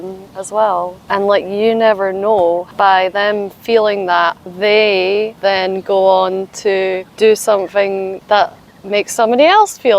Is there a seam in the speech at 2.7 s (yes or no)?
yes